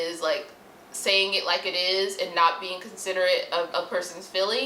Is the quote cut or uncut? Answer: cut